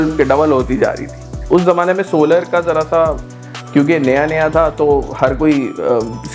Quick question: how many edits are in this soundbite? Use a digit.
1